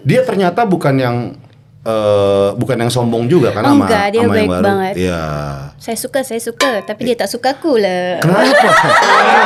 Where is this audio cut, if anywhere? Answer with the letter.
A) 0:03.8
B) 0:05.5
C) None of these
C